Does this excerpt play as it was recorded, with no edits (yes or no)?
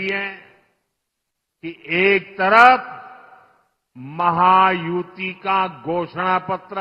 yes